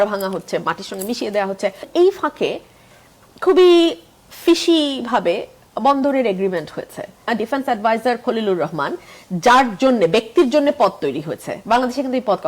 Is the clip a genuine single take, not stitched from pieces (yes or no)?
no